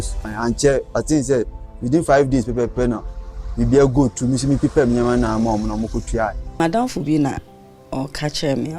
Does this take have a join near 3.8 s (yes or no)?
no